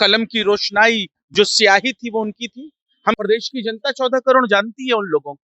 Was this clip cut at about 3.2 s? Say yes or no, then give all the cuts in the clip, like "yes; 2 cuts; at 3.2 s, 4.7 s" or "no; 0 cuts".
yes; 1 cut; at 3.2 s